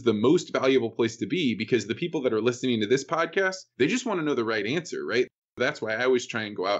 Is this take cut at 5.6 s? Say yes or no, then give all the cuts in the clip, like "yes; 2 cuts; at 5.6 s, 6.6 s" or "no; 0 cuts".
yes; 1 cut; at 5.6 s